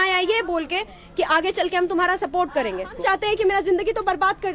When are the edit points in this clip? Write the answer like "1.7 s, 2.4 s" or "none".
3.0 s